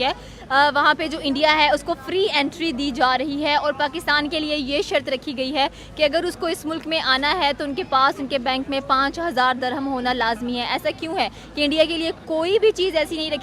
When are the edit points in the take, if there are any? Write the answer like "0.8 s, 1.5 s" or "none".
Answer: none